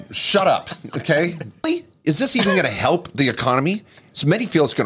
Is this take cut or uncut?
cut